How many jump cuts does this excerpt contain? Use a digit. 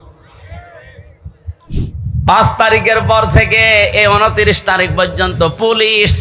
1